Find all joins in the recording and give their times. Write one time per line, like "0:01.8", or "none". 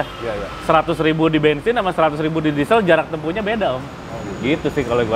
none